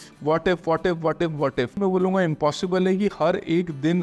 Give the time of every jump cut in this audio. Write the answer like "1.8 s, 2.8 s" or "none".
1.8 s